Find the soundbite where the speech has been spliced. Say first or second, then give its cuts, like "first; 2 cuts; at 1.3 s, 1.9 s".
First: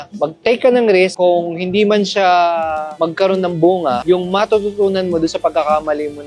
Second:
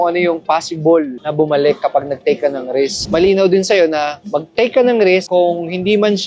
second; 1 cut; at 3.0 s